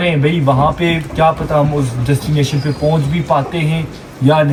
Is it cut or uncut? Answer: uncut